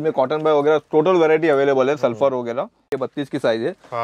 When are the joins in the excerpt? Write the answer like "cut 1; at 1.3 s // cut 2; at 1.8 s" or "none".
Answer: cut 1; at 3.0 s